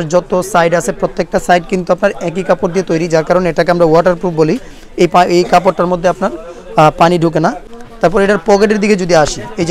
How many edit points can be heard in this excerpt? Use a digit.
0